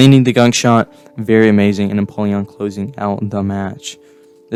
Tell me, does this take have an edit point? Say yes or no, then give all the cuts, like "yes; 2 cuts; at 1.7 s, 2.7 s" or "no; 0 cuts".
no; 0 cuts